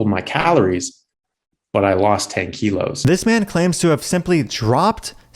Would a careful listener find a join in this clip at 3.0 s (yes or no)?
yes